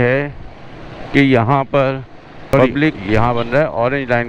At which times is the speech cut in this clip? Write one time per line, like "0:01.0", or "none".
0:03.0